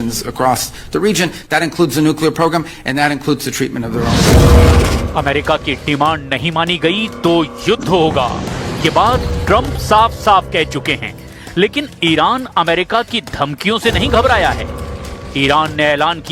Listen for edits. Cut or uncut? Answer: cut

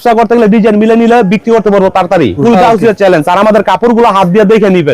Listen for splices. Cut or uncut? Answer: cut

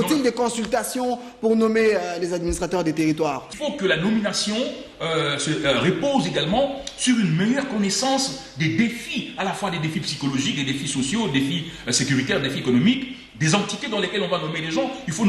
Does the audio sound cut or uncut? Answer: cut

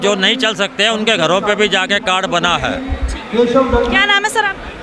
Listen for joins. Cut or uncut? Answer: uncut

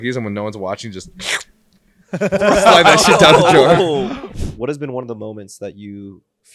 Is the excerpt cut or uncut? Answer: cut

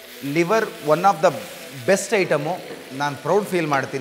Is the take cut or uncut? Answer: cut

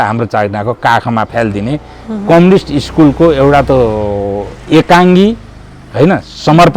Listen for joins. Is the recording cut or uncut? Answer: uncut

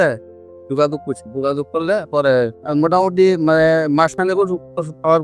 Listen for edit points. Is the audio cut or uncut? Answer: cut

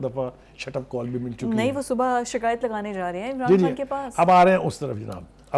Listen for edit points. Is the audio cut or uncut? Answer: uncut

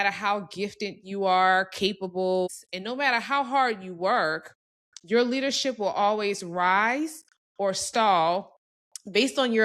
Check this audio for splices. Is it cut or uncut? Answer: cut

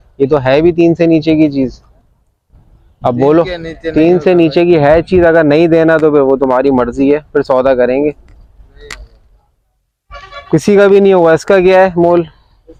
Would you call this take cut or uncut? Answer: uncut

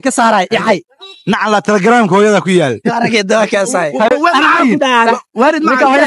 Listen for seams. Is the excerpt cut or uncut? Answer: uncut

